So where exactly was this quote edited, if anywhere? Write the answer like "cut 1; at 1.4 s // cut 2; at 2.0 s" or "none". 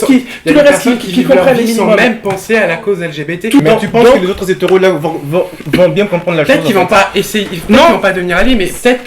none